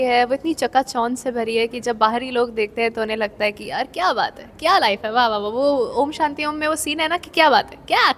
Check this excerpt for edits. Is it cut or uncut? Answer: uncut